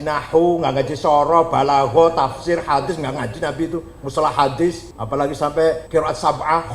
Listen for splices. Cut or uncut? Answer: cut